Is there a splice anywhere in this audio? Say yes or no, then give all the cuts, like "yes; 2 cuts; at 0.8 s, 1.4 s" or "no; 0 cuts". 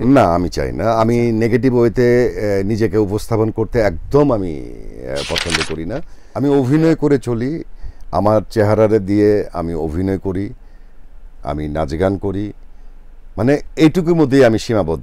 yes; 1 cut; at 6.2 s